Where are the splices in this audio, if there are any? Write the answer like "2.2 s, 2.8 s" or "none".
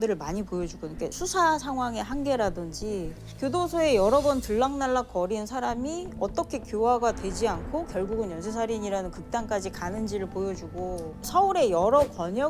none